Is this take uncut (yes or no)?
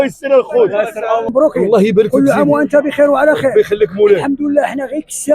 no